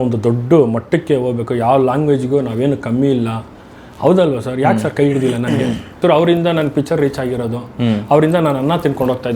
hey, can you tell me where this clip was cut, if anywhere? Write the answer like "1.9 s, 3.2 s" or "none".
5.9 s